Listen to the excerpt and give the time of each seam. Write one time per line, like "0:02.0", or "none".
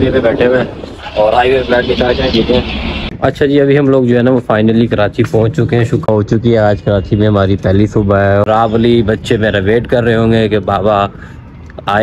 0:03.1
0:06.1
0:08.5